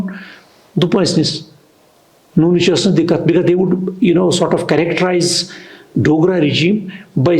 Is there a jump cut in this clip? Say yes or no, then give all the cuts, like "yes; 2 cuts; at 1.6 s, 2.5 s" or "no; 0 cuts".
no; 0 cuts